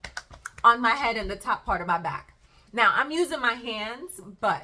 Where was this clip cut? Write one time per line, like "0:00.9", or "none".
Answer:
none

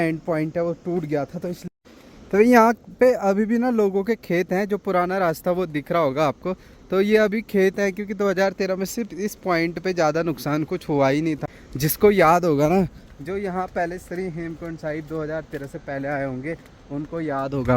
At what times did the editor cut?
0:01.6
0:11.4

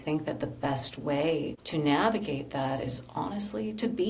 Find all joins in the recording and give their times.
0:01.6

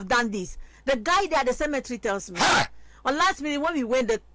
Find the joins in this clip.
none

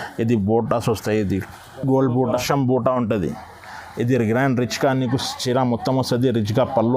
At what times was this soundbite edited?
0:02.3

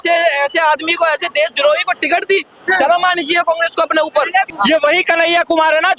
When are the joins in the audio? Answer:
0:04.5

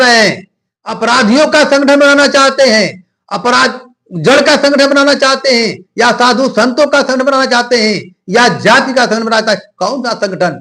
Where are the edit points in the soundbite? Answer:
none

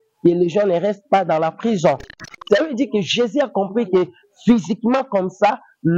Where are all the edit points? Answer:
0:02.2

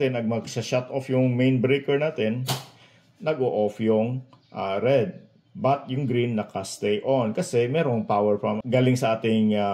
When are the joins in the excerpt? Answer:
0:08.6

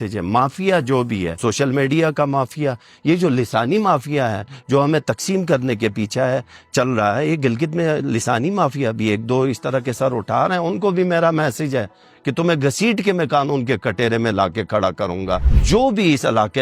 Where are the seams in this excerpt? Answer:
0:01.3
0:15.5

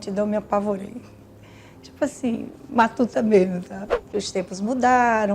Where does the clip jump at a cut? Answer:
0:04.2

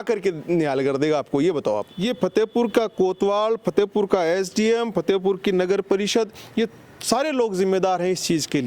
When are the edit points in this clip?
0:01.9

